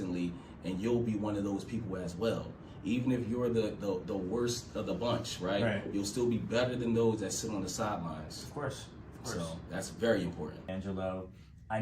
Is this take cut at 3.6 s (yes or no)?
no